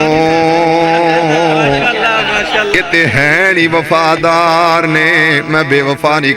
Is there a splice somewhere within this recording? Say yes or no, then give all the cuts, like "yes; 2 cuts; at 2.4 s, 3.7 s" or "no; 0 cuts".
no; 0 cuts